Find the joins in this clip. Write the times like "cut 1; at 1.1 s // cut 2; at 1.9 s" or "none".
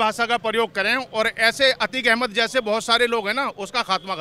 none